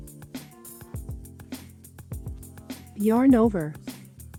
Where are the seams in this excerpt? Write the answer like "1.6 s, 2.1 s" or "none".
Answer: none